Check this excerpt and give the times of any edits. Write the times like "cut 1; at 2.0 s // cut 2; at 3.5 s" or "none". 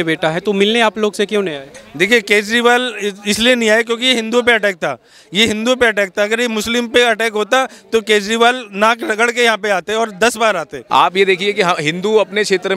cut 1; at 10.7 s